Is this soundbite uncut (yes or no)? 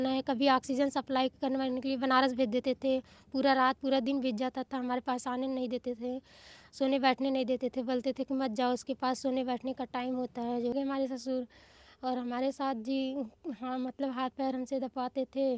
no